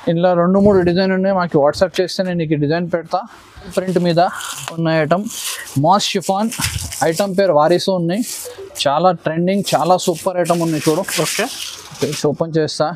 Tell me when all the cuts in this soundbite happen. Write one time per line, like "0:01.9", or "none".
0:03.7